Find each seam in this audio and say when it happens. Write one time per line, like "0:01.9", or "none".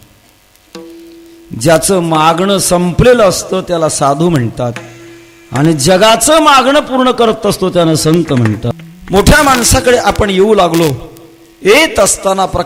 0:08.7